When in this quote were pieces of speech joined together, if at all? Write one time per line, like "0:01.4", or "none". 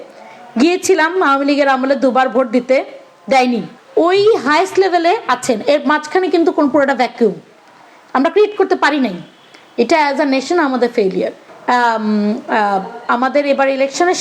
0:03.7
0:11.4